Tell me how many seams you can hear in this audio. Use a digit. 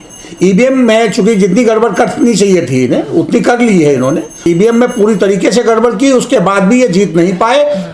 1